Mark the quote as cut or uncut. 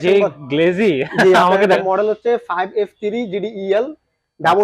cut